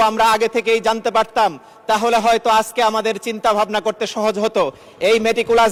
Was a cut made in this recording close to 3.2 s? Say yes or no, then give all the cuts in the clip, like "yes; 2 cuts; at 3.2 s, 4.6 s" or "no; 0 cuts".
no; 0 cuts